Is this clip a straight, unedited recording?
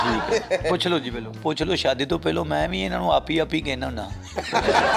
no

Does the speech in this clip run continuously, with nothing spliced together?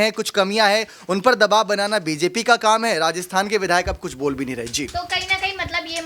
yes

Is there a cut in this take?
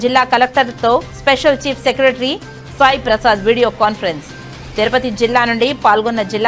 no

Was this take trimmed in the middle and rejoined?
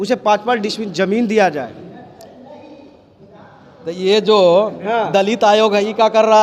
no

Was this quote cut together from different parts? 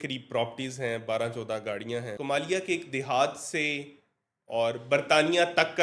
yes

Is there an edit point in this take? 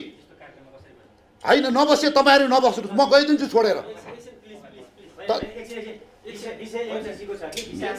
no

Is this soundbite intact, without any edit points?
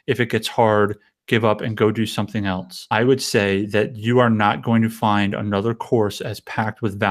no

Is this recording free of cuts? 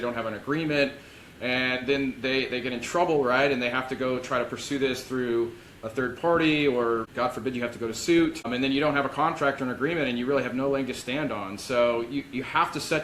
yes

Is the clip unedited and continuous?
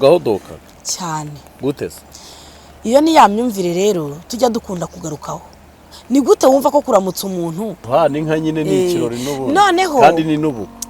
no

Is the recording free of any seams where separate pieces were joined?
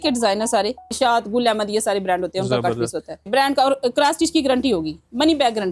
no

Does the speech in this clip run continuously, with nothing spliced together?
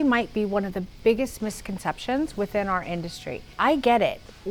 no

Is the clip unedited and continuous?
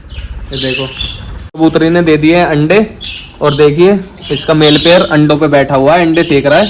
no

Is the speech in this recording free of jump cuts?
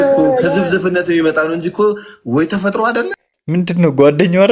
yes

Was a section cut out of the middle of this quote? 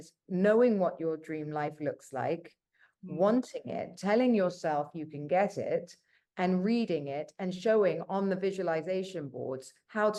no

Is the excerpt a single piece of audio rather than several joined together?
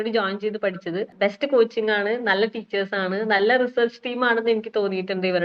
no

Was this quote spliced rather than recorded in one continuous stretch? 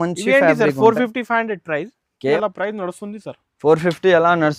yes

